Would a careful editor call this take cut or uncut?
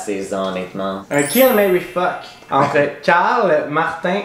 cut